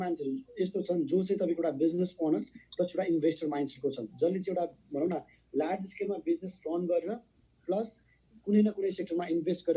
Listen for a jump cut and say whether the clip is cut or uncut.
uncut